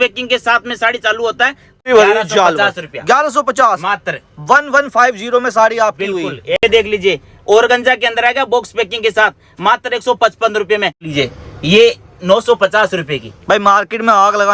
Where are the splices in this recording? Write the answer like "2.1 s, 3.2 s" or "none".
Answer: 1.8 s, 6.6 s, 11.0 s